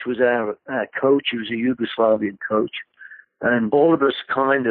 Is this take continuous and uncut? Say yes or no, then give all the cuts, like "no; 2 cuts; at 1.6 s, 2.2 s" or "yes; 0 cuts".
no; 1 cut; at 3.7 s